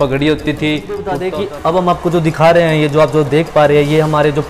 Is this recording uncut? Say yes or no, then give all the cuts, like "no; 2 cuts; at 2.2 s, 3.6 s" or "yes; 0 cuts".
no; 1 cut; at 1.2 s